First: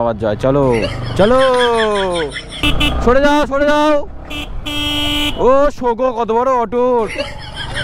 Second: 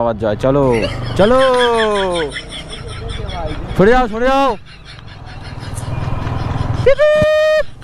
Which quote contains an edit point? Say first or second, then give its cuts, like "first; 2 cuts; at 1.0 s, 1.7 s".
first; 1 cut; at 2.6 s